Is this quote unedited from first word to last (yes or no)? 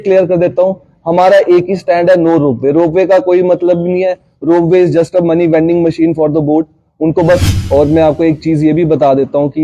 no